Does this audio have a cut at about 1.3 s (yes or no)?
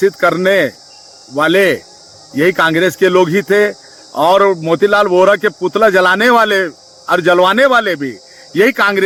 no